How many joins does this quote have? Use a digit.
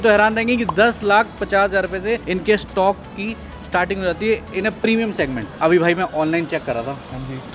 1